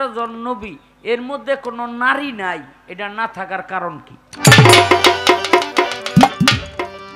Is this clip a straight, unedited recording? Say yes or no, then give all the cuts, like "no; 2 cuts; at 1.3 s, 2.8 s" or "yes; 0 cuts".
yes; 0 cuts